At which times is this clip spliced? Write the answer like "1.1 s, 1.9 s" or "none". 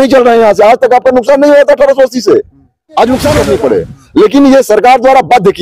3.4 s